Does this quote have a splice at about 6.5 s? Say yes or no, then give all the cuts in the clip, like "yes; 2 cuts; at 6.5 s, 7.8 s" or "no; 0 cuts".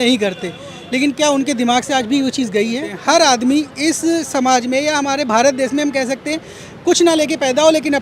no; 1 cut; at 2.9 s